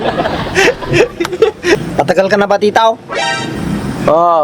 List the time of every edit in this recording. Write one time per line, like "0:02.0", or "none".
0:01.8